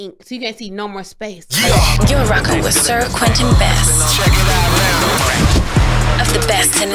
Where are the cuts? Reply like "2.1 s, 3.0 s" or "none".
1.4 s